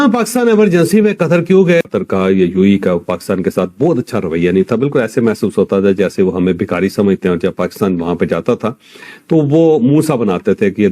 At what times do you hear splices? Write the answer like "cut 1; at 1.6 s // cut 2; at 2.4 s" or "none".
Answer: cut 1; at 1.9 s